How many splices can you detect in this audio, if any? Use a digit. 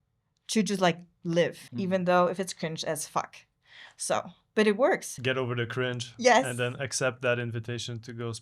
2